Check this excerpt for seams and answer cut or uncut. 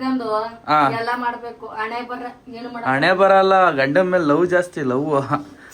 uncut